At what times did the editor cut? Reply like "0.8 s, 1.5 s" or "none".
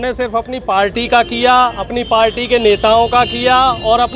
none